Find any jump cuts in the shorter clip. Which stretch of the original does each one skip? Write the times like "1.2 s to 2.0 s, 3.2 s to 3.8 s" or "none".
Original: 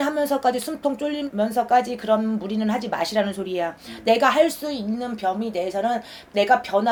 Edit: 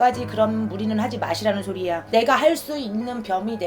3.7 s to 4.0 s